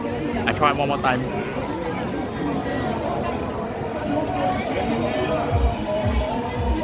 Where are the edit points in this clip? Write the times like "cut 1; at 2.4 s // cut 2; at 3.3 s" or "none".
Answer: none